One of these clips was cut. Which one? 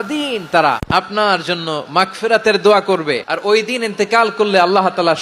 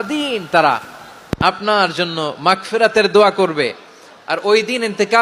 first; 2 cuts; at 1.1 s, 3.3 s

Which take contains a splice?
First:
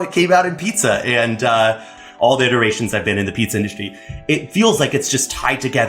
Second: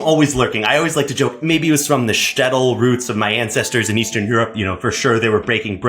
first; 1 cut; at 1.9 s

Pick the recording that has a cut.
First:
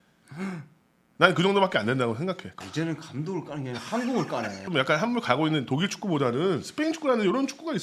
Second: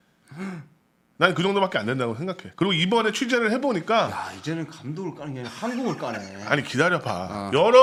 first; 2 cuts; at 2.5 s, 4.6 s

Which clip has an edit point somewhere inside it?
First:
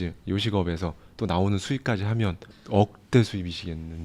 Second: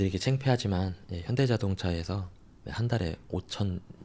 first; 1 cut; at 2.5 s

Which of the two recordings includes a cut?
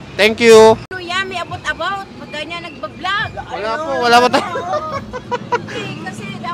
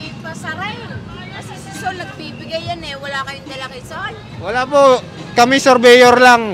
first; 1 cut; at 1.0 s

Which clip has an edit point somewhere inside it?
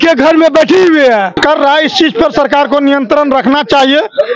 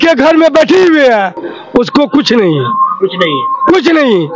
first; 1 cut; at 1.4 s

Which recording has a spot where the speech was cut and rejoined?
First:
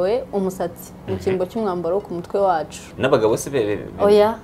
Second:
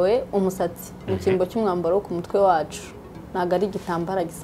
first; 1 cut; at 2.8 s

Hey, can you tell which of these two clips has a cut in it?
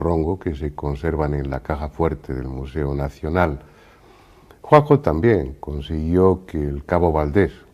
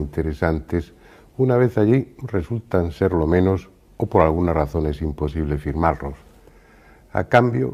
first; 1 cut; at 3.2 s

